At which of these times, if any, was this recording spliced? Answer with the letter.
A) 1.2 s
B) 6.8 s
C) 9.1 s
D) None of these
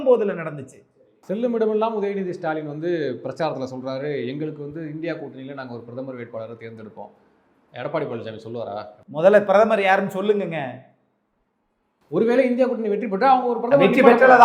A